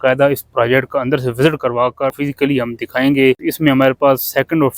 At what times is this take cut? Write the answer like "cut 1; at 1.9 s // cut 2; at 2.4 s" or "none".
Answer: cut 1; at 2.2 s // cut 2; at 3.5 s